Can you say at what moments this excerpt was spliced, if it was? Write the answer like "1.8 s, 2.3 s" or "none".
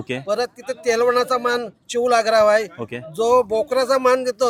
none